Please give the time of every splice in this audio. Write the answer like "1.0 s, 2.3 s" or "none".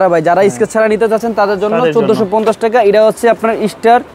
none